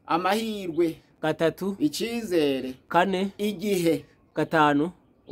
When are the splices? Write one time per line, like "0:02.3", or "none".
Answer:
0:04.1